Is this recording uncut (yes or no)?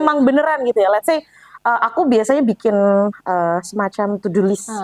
yes